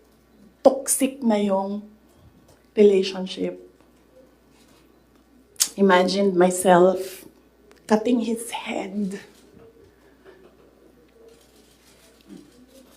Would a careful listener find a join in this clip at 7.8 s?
no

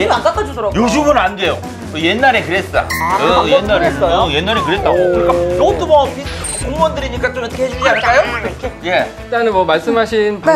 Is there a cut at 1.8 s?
no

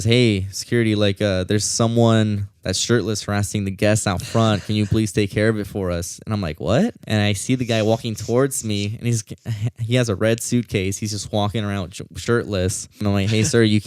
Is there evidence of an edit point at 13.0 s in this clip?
yes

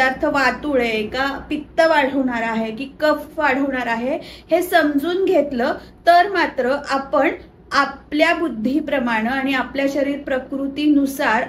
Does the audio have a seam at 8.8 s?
no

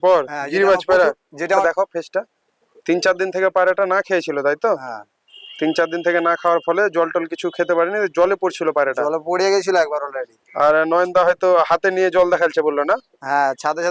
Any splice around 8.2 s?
no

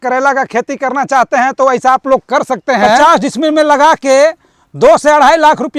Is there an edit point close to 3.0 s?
yes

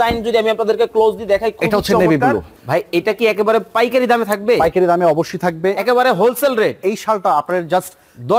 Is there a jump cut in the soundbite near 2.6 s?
yes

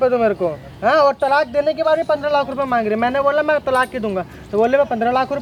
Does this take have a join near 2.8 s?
no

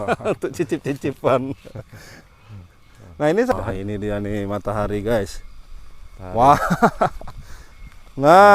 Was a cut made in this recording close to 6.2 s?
no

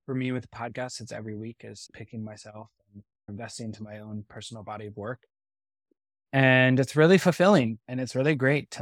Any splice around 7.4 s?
no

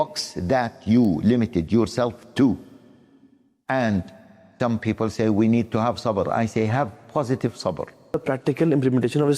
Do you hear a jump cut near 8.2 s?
yes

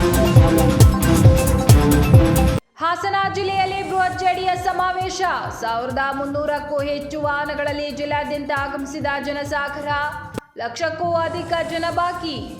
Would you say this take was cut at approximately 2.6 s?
yes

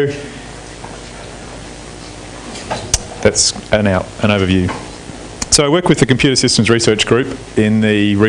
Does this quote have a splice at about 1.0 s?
yes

